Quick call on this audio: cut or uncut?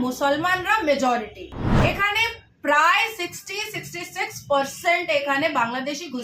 uncut